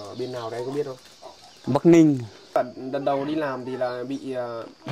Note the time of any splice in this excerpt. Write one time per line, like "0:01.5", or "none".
0:02.6

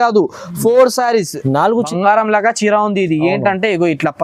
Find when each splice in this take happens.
0:01.8

